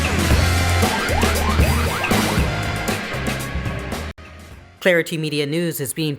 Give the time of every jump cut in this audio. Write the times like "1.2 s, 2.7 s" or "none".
4.1 s